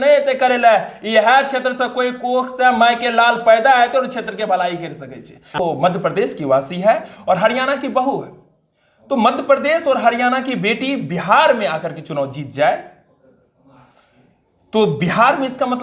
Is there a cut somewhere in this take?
yes; 1 cut; at 5.6 s

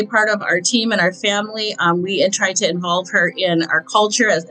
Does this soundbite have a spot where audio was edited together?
no; 0 cuts

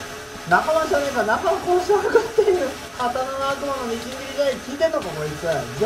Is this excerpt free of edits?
no; 1 cut; at 2.8 s

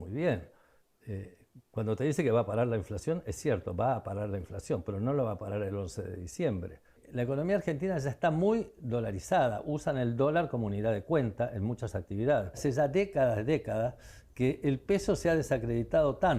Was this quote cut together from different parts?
yes; 2 cuts; at 7.0 s, 12.6 s

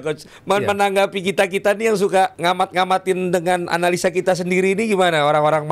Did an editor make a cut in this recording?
yes; 1 cut; at 2.4 s

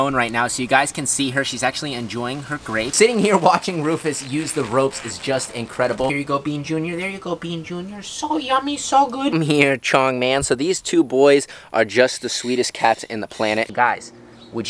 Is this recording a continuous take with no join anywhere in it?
no; 4 cuts; at 2.9 s, 6.1 s, 9.3 s, 13.7 s

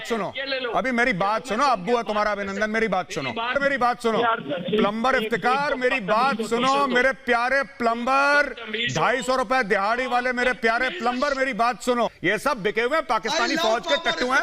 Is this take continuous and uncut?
no; 2 cuts; at 3.5 s, 12.2 s

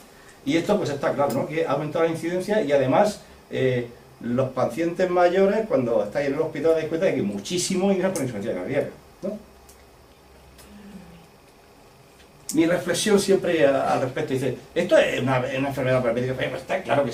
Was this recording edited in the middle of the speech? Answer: no; 0 cuts

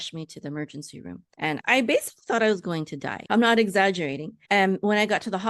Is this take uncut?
no; 1 cut; at 3.2 s

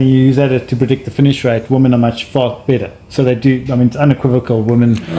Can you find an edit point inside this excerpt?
no; 0 cuts

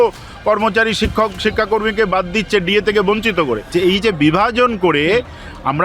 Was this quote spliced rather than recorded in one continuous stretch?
yes; 1 cut; at 3.7 s

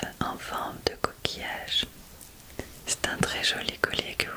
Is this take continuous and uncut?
no; 1 cut; at 2.0 s

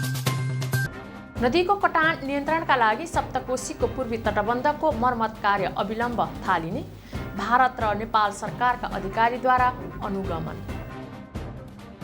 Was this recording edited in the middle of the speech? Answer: yes; 1 cut; at 1.0 s

